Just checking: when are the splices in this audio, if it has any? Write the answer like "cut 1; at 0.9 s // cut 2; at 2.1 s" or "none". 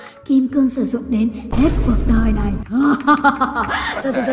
none